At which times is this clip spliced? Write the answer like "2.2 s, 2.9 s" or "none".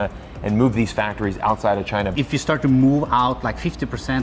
2.1 s